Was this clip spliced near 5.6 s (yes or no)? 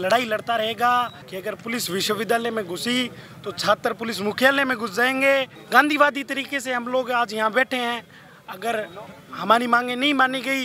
yes